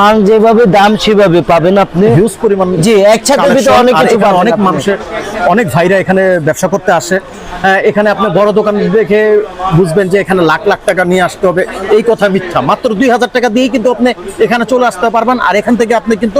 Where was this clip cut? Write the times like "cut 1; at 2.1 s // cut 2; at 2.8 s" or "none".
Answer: cut 1; at 2.1 s